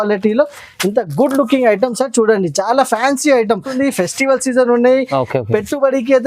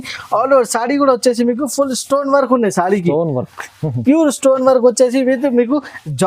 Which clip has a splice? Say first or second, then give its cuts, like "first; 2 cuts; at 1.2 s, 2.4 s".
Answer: first; 1 cut; at 3.7 s